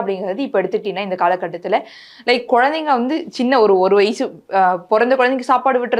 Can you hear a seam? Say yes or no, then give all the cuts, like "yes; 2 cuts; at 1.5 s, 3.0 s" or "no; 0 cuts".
no; 0 cuts